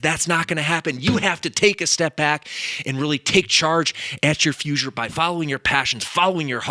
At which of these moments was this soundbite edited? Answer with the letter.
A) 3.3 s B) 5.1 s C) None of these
B